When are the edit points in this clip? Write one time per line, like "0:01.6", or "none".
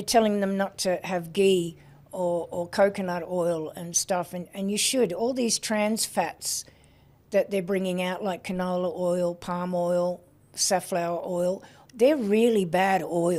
none